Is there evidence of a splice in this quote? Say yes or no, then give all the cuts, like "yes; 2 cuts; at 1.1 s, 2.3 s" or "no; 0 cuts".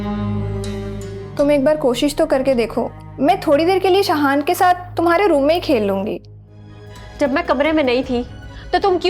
yes; 2 cuts; at 1.2 s, 6.4 s